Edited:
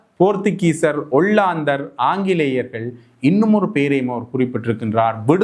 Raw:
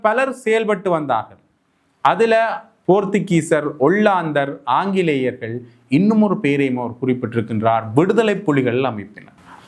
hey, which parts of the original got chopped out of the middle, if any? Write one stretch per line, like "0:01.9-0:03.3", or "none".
none